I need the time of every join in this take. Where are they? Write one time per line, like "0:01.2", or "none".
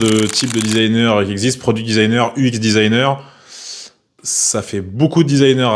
0:04.1